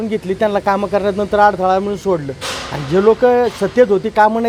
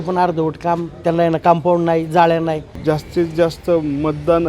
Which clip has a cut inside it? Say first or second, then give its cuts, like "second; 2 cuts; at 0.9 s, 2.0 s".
second; 1 cut; at 2.7 s